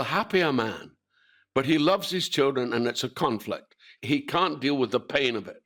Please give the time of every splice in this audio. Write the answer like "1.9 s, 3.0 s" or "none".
4.2 s